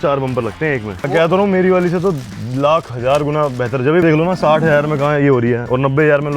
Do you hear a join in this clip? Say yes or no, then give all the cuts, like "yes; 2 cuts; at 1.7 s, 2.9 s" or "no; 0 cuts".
yes; 2 cuts; at 1.0 s, 4.0 s